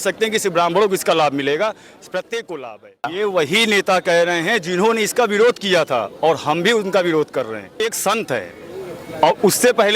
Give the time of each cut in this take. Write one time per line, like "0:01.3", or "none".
0:03.1
0:07.8